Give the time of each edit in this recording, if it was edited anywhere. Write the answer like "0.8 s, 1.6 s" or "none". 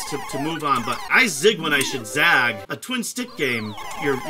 1.1 s, 2.7 s